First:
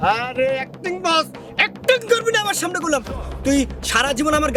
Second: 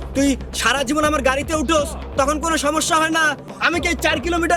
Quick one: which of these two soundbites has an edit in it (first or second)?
second